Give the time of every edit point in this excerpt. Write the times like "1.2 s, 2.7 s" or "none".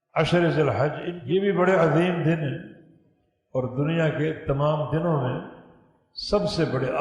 1.1 s